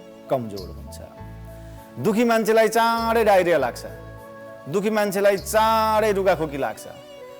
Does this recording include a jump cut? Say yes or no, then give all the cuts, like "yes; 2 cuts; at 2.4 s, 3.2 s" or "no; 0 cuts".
no; 0 cuts